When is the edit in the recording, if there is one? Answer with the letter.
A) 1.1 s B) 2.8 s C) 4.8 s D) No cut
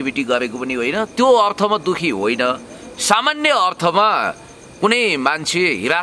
D